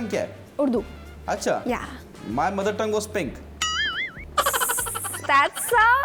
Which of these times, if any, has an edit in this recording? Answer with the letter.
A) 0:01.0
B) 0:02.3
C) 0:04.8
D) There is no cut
D